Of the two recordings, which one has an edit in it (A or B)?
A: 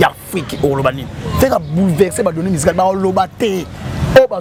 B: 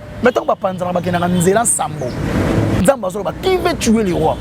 B